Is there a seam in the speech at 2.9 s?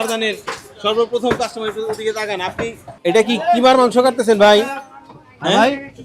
yes; 1 cut; at 2.9 s

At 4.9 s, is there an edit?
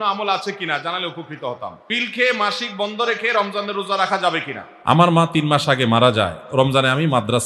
yes; 2 cuts; at 1.8 s, 4.9 s

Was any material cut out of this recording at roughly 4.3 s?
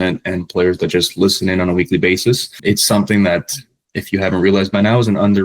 no; 1 cut; at 2.5 s

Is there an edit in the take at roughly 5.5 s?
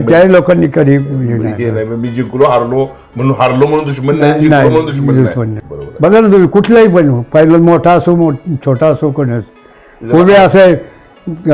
yes; 1 cut; at 5.5 s

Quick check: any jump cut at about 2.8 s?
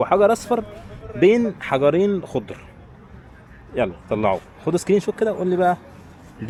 no; 0 cuts

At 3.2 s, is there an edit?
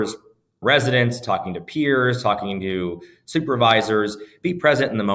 no; 0 cuts

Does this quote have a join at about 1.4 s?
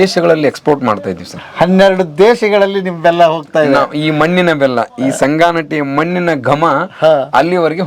no; 0 cuts

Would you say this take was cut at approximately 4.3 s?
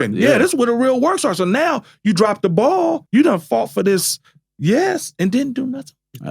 no; 1 cut; at 3.0 s

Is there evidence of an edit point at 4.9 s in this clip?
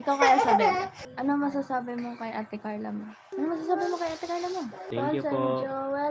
yes; 3 cuts; at 1.0 s, 3.3 s, 4.9 s

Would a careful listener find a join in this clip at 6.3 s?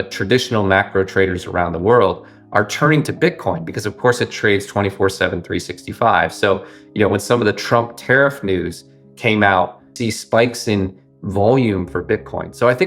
no; 1 cut; at 9.9 s

